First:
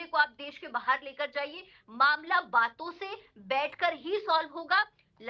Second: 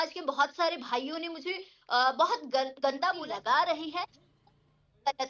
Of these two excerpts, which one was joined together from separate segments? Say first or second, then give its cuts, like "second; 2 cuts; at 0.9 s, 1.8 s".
second; 1 cut; at 3.2 s